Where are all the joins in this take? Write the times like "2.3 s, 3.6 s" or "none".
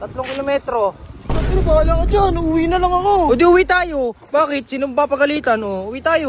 none